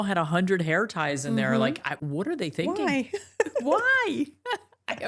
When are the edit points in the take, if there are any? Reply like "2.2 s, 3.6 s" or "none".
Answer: none